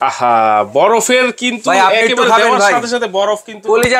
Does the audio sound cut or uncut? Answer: uncut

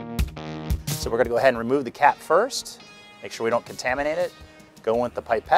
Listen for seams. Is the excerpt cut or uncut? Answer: cut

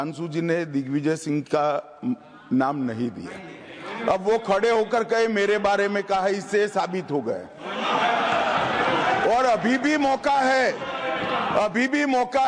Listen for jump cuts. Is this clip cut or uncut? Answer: uncut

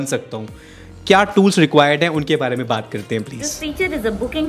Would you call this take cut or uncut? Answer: cut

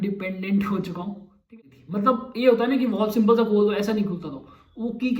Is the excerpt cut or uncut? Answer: cut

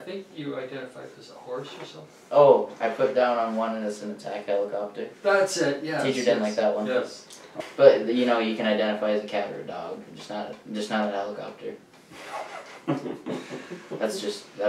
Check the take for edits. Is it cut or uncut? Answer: uncut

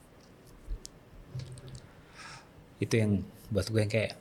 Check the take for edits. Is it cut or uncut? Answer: uncut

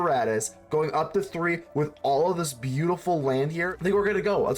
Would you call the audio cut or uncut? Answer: cut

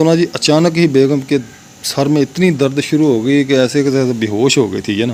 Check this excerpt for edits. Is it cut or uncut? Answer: uncut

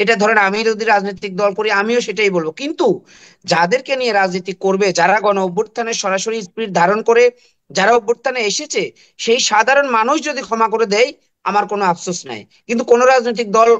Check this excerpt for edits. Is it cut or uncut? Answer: uncut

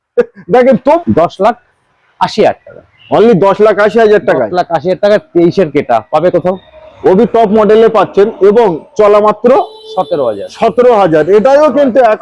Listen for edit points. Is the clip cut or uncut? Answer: cut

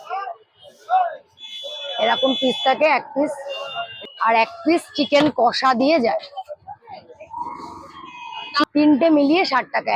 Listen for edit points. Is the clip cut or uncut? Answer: cut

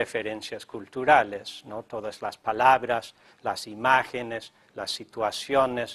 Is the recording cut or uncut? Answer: uncut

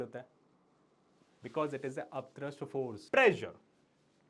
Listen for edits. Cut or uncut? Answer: cut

